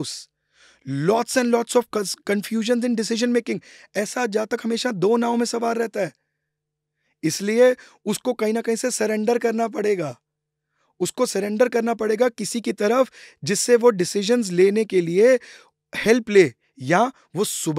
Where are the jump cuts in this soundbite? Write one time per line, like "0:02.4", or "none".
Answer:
none